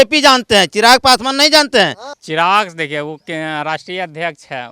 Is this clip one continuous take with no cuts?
no; 1 cut; at 2.1 s

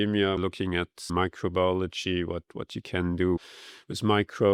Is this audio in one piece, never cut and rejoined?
yes; 0 cuts

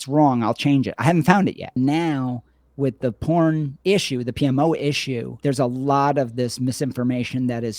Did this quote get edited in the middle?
yes; 3 cuts; at 1.8 s, 3.7 s, 5.3 s

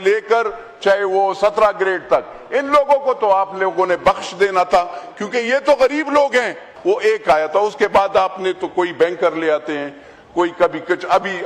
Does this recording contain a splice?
yes; 1 cut; at 6.7 s

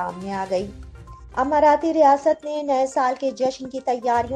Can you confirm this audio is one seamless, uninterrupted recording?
no; 1 cut; at 1.2 s

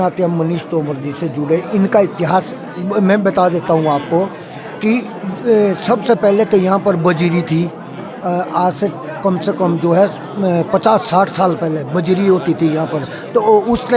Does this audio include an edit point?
no; 0 cuts

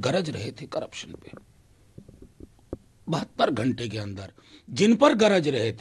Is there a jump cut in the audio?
no; 0 cuts

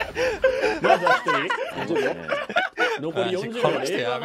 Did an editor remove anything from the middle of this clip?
no; 0 cuts

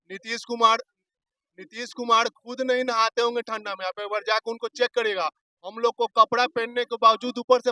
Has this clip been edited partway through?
no; 0 cuts

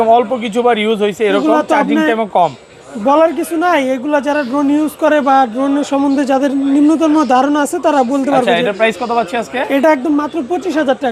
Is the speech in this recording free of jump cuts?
yes; 0 cuts

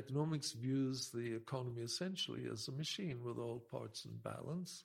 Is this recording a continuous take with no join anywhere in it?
yes; 0 cuts

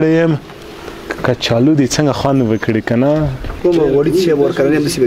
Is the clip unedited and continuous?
no; 1 cut; at 3.6 s

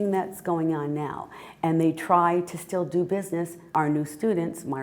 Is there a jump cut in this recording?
yes; 1 cut; at 3.7 s

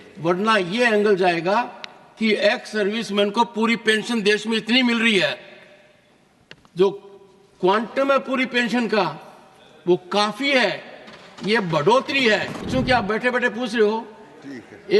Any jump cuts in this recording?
yes; 1 cut; at 12.7 s

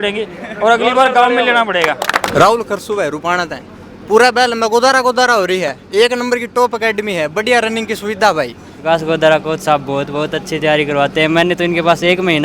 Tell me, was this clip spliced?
yes; 2 cuts; at 2.3 s, 8.7 s

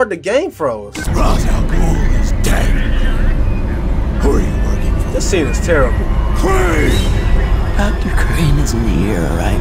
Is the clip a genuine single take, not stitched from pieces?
no; 1 cut; at 1.1 s

